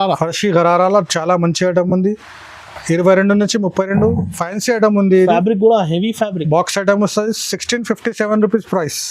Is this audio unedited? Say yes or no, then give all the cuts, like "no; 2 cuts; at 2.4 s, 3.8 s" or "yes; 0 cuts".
yes; 0 cuts